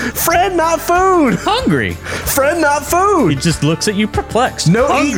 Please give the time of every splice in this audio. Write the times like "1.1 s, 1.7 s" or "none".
none